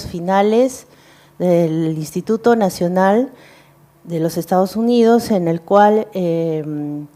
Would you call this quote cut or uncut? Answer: cut